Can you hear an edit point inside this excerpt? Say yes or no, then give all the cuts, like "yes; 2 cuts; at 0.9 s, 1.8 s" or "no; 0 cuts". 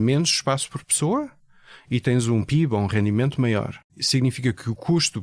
yes; 1 cut; at 4.0 s